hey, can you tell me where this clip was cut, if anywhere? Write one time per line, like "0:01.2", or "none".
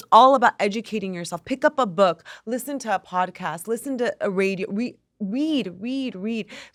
none